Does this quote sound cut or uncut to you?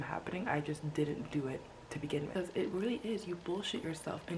cut